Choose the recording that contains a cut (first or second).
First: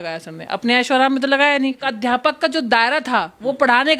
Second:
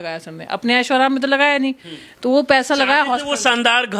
first